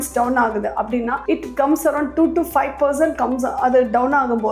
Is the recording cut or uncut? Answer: uncut